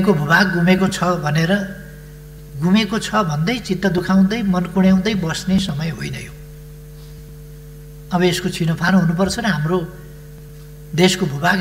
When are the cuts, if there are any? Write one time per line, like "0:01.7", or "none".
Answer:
none